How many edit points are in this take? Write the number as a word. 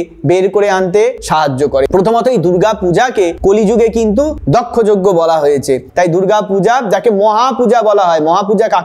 two